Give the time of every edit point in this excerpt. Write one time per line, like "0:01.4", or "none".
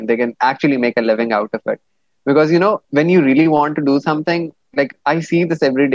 0:02.8